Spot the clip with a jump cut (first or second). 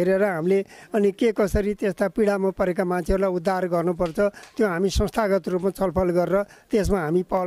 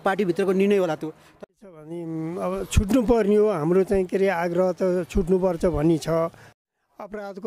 second